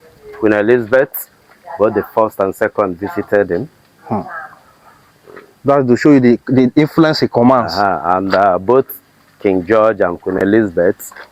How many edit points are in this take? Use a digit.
0